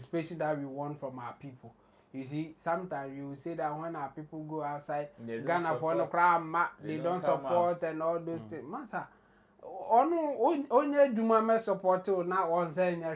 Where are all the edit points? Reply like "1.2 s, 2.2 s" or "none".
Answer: none